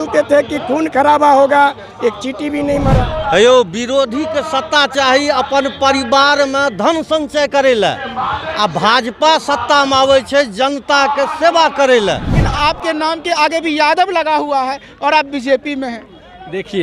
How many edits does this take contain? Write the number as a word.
two